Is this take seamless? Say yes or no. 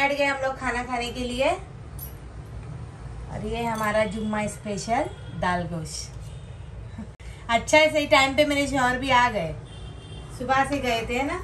yes